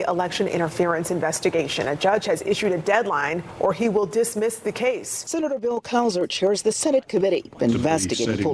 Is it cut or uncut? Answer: cut